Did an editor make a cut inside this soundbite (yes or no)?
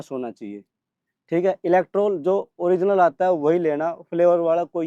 no